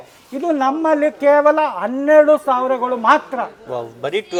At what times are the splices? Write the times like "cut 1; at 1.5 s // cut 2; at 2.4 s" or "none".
none